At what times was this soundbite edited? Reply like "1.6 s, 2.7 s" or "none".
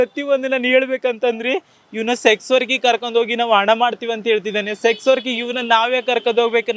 none